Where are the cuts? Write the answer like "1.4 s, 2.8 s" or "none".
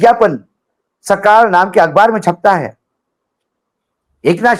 none